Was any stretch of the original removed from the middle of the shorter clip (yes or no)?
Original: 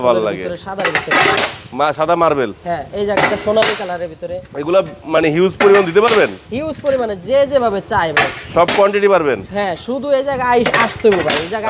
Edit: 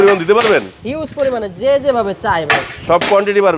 no